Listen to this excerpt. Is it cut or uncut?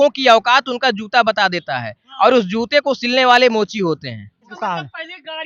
cut